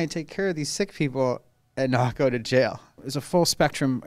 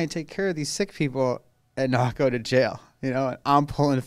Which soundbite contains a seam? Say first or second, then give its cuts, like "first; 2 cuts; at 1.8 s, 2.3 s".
first; 1 cut; at 3.0 s